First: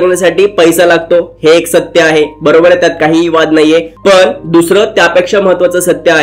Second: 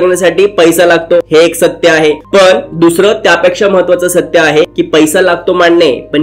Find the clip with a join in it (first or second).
second